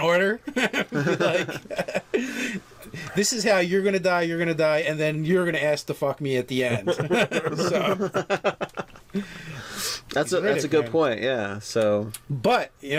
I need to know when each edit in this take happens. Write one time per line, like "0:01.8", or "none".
none